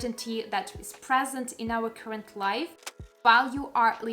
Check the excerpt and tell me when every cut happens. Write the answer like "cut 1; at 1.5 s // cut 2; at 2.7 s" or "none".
cut 1; at 2.8 s